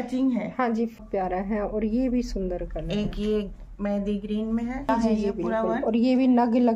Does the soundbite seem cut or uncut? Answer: cut